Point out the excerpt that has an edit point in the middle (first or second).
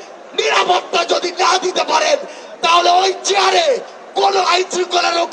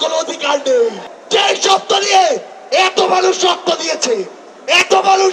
second